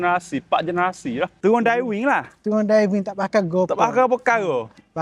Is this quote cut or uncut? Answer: cut